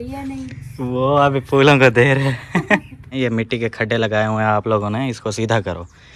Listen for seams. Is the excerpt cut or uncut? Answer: cut